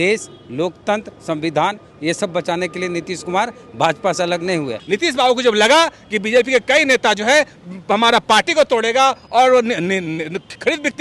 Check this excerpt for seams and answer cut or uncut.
cut